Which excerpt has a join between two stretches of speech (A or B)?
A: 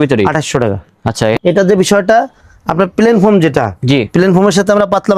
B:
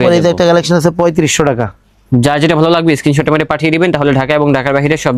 A